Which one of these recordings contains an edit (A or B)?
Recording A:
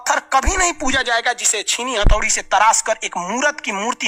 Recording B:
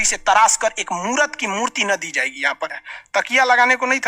B